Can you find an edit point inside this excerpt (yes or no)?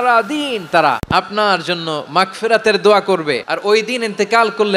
yes